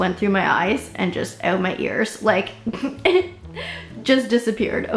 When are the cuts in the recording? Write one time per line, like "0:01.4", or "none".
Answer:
none